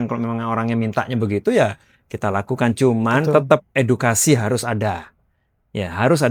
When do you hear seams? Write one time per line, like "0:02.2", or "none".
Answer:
none